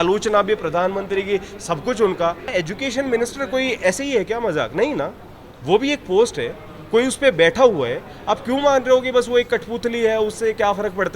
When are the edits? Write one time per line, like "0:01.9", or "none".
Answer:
0:02.5